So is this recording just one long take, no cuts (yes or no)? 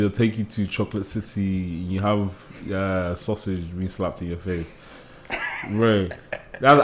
yes